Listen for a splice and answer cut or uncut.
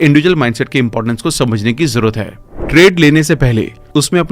cut